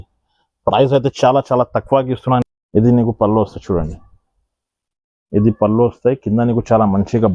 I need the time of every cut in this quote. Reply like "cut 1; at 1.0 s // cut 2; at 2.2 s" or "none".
cut 1; at 2.4 s